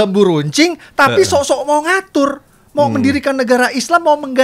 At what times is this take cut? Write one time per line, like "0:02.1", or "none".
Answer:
none